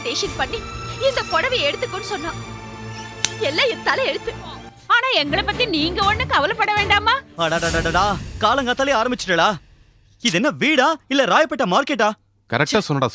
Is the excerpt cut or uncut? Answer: cut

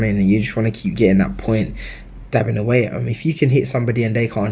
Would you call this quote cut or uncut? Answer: uncut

